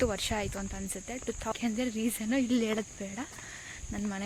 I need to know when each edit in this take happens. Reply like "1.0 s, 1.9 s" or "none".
1.5 s